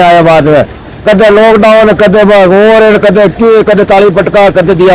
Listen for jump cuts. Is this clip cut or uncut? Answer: uncut